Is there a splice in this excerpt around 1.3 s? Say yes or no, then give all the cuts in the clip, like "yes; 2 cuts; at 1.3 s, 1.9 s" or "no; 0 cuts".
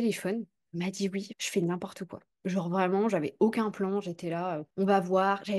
yes; 1 cut; at 1.3 s